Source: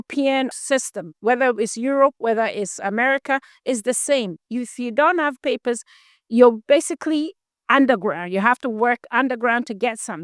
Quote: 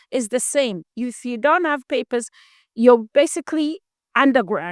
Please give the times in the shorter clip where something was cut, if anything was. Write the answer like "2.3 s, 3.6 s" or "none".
none